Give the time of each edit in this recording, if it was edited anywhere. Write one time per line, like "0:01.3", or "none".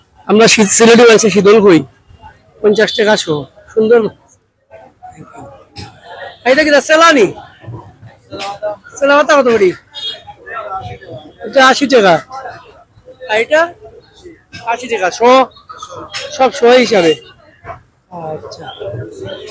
none